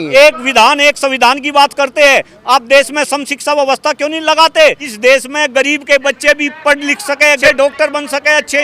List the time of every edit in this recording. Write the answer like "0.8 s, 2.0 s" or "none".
4.9 s, 7.4 s